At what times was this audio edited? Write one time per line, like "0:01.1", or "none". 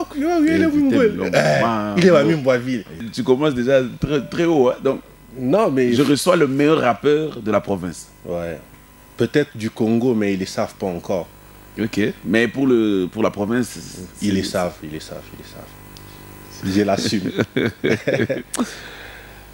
0:03.1